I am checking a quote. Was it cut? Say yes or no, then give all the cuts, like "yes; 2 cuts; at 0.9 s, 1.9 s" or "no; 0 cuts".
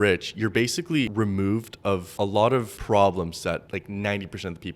yes; 3 cuts; at 1.1 s, 2.5 s, 3.7 s